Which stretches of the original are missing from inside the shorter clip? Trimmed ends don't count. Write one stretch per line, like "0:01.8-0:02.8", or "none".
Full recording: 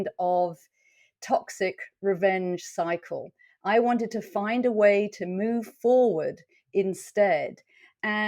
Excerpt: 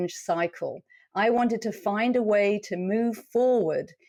none